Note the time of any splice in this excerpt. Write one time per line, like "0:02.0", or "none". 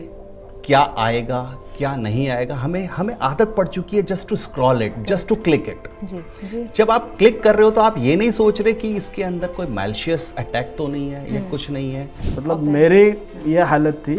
0:12.1